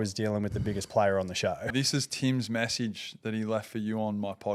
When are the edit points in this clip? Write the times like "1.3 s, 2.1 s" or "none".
1.8 s